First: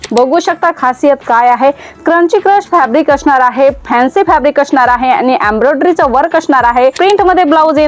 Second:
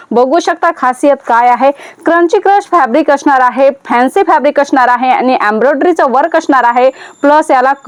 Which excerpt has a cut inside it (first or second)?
first